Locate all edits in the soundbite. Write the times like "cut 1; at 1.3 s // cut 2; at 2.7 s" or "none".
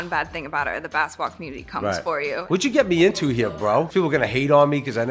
cut 1; at 2.5 s // cut 2; at 3.9 s